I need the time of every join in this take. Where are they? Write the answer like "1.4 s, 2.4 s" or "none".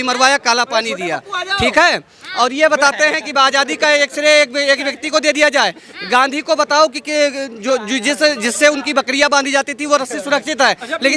none